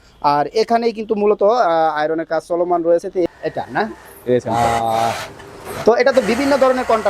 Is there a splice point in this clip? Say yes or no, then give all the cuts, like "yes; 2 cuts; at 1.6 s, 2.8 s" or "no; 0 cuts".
yes; 1 cut; at 3.3 s